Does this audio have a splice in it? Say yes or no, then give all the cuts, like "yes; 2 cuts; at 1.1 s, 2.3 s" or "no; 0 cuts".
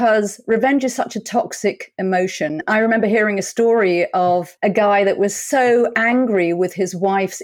yes; 2 cuts; at 2.6 s, 4.5 s